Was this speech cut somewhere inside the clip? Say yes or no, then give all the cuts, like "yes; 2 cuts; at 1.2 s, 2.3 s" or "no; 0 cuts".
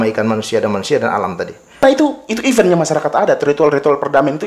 yes; 1 cut; at 1.8 s